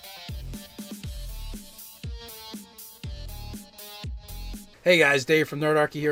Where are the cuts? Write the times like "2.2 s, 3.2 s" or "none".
none